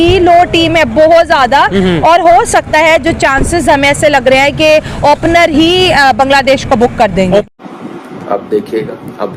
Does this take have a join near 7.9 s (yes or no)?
yes